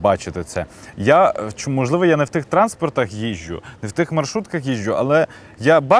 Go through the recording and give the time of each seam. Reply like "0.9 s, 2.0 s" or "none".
none